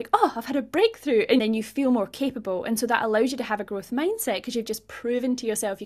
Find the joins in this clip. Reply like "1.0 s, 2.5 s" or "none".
1.4 s